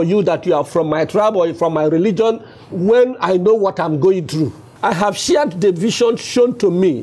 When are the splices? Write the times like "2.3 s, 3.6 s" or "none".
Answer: 4.6 s